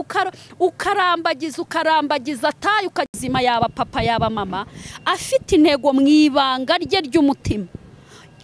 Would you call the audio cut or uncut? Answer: cut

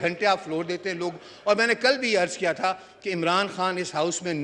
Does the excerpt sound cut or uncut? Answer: uncut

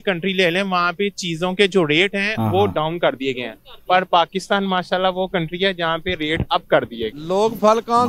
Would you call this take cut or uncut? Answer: cut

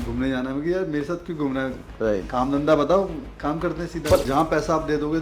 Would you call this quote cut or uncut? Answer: cut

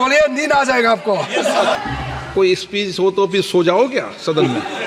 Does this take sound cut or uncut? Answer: cut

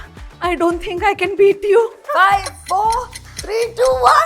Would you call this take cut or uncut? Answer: cut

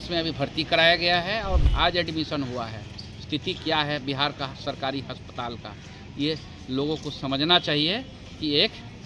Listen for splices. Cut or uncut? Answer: cut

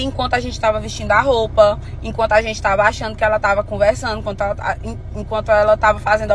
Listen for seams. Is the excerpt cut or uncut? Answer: uncut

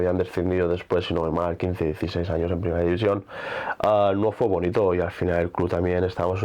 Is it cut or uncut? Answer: uncut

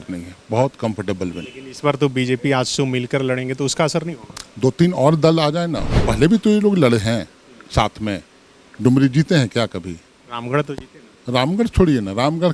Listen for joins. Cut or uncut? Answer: cut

